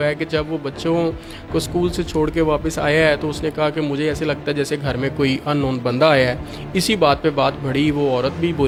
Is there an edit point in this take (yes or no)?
no